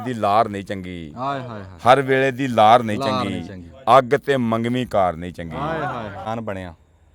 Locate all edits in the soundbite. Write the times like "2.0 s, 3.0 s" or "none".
6.2 s